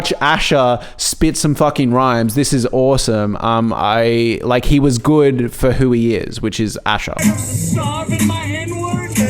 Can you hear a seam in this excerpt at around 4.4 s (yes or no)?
no